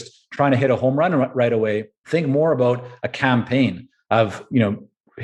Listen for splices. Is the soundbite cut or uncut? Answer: cut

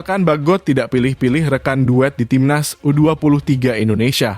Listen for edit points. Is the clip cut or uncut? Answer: uncut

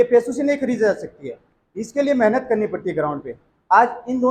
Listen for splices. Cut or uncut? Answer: uncut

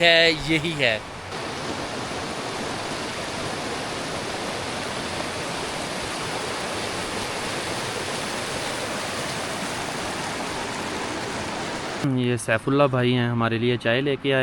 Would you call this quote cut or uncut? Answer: cut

